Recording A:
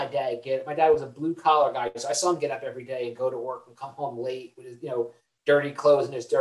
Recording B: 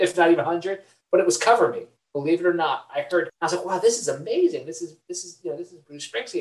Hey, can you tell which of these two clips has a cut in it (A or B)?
B